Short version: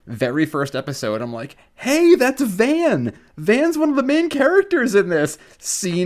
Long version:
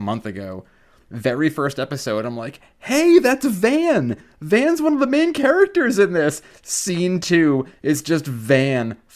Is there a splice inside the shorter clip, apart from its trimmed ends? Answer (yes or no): no